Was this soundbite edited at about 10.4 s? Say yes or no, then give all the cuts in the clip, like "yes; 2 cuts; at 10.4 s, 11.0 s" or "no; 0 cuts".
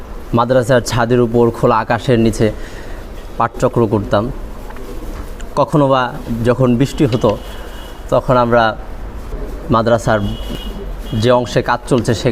yes; 1 cut; at 10.4 s